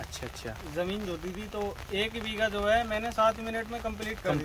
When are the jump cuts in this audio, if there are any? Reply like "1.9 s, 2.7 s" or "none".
none